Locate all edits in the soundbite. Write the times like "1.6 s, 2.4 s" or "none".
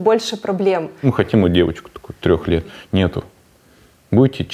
1.1 s